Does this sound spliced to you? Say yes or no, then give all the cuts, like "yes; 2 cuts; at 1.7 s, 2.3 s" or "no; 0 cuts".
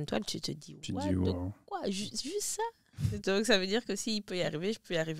no; 0 cuts